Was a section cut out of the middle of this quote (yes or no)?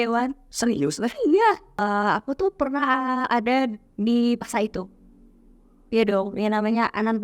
yes